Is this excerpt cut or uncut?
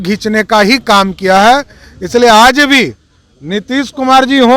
uncut